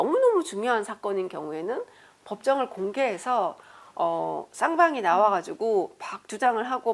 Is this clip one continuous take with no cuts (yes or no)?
yes